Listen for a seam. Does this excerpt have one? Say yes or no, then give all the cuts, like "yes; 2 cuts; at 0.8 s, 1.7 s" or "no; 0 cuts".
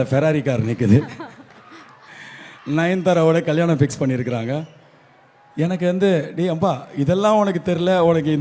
no; 0 cuts